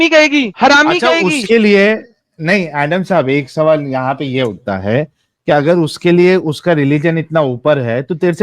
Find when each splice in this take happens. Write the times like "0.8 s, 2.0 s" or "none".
none